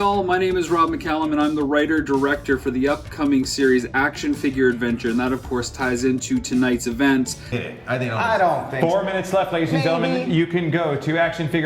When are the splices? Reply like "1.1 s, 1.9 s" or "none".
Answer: 7.6 s

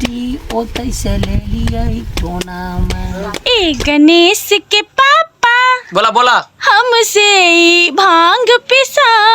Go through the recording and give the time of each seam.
3.3 s

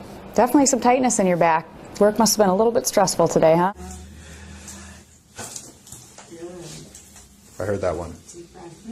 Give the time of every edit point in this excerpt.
3.8 s

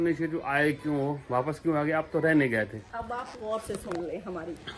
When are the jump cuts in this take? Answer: none

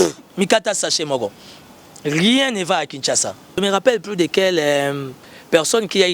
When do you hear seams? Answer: 3.5 s

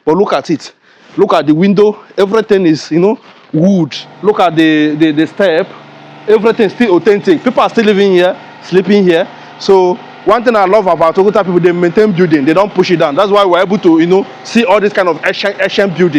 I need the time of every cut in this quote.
4.0 s

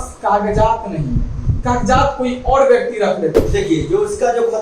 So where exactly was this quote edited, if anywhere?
3.4 s

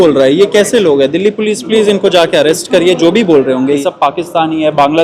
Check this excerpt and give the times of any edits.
3.8 s

